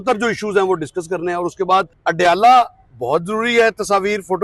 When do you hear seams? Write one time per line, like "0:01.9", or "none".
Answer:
0:01.9